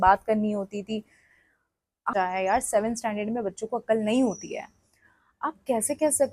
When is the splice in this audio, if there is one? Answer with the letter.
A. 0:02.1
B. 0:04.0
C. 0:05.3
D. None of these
A